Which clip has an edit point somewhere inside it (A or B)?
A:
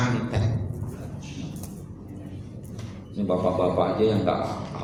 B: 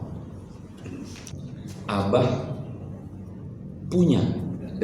B